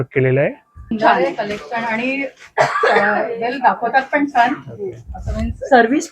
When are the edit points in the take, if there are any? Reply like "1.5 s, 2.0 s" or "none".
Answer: 0.9 s